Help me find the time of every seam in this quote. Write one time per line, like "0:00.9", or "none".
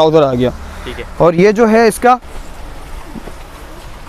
none